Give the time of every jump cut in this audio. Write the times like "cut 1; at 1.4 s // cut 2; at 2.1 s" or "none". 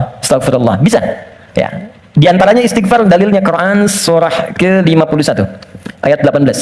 none